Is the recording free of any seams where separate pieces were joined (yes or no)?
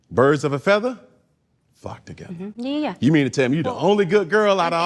yes